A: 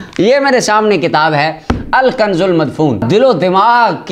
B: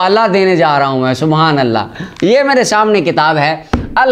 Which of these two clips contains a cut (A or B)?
A